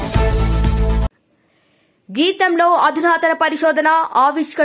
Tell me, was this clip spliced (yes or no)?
no